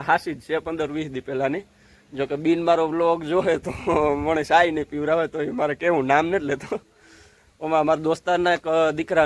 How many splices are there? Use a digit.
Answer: 0